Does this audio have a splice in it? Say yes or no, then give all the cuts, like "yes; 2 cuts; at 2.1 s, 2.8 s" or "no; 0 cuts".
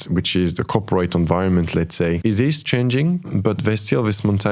yes; 2 cuts; at 2.2 s, 3.3 s